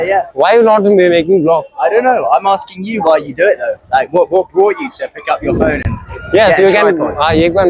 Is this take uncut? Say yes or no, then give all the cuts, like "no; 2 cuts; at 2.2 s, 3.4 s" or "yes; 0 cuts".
yes; 0 cuts